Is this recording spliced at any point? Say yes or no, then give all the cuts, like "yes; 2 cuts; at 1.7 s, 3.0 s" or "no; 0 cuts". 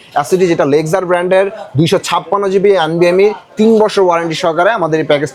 no; 0 cuts